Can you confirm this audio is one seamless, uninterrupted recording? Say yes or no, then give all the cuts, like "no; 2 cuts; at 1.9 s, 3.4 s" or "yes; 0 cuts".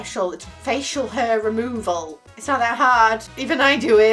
yes; 0 cuts